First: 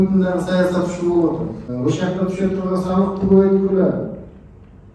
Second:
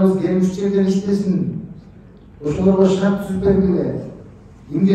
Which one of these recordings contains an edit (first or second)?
first